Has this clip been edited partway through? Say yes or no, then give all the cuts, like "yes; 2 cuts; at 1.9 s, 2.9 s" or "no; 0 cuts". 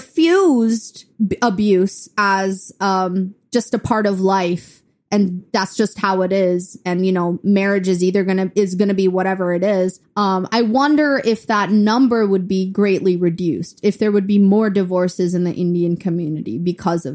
yes; 2 cuts; at 1.0 s, 10.0 s